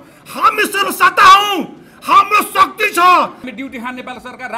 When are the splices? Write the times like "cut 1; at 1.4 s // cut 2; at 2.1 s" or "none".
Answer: cut 1; at 3.4 s

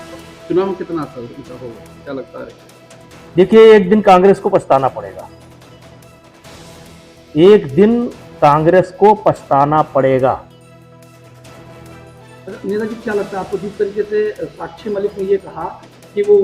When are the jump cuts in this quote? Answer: none

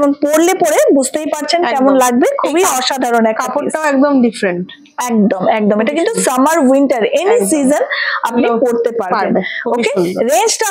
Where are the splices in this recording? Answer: none

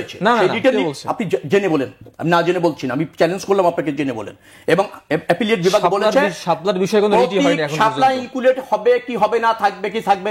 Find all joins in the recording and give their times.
none

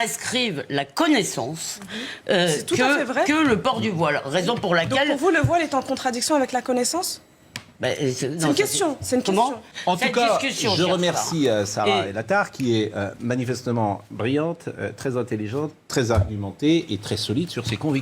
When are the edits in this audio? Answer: cut 1; at 9.7 s

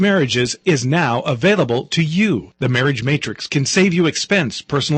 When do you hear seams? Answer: none

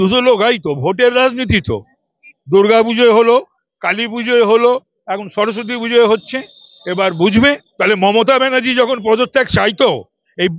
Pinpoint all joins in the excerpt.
cut 1; at 7.7 s

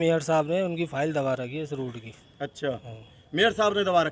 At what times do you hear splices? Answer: none

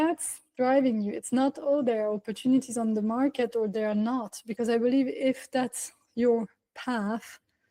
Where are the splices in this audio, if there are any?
none

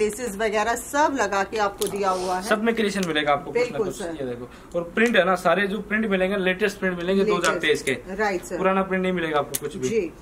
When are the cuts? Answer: none

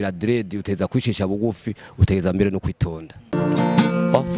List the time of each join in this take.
cut 1; at 3.3 s

